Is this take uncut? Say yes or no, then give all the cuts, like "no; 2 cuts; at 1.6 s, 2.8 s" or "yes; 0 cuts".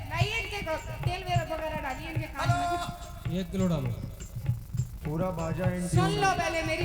yes; 0 cuts